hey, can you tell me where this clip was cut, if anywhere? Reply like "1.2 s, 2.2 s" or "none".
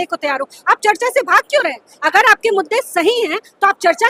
none